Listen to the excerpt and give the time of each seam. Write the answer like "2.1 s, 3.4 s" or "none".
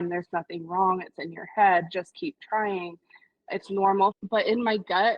4.2 s